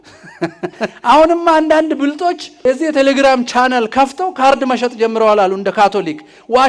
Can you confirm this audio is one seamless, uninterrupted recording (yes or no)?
no